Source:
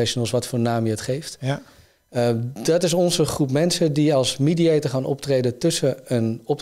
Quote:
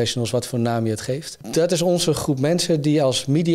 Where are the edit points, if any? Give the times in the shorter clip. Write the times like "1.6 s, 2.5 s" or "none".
1.4 s